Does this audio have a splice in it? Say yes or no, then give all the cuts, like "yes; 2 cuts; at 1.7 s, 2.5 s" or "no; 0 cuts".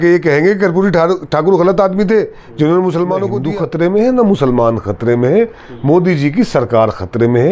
yes; 1 cut; at 3.4 s